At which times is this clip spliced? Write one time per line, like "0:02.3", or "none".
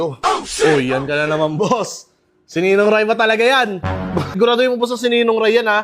0:04.4